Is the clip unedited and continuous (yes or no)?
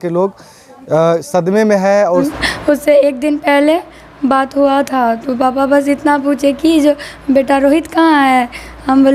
no